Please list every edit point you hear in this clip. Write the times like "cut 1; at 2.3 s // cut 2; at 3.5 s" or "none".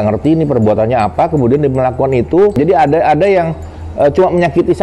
cut 1; at 2.6 s